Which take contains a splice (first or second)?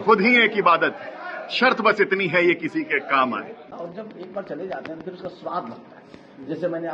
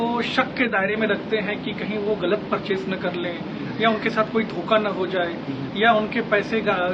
first